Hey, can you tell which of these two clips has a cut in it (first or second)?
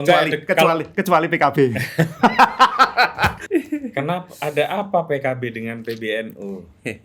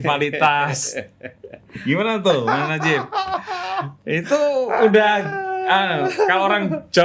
first